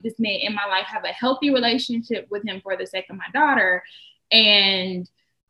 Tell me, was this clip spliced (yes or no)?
no